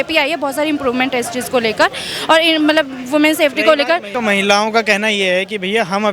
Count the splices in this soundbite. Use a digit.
1